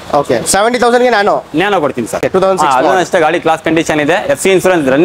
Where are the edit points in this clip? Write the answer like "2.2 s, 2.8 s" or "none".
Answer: 2.2 s